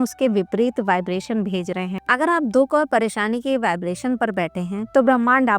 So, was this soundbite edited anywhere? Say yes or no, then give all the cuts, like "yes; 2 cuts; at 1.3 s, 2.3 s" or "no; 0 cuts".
yes; 1 cut; at 2.0 s